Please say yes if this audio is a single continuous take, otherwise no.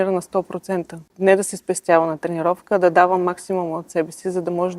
no